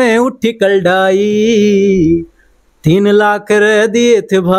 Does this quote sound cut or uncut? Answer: uncut